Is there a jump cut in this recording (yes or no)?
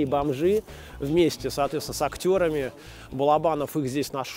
no